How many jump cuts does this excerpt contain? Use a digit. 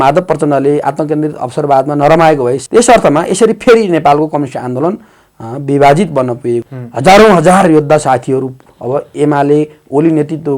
2